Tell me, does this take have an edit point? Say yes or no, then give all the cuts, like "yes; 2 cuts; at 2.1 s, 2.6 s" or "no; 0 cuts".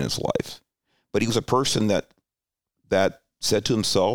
no; 0 cuts